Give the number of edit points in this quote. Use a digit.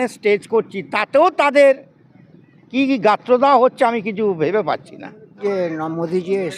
1